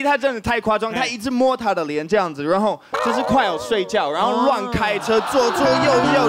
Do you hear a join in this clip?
no; 0 cuts

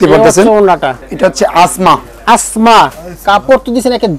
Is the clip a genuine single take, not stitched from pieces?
no; 1 cut; at 1.0 s

